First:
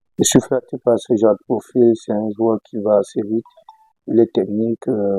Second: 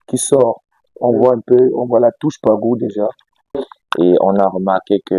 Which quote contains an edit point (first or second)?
second